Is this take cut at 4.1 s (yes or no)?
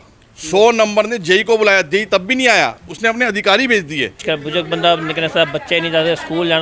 yes